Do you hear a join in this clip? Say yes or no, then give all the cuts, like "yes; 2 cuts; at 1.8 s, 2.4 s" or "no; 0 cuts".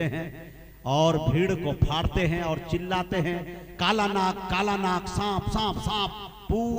no; 0 cuts